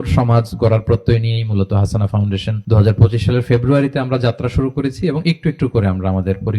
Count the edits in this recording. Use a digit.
1